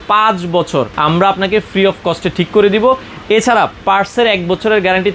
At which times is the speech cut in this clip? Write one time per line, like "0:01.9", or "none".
0:00.9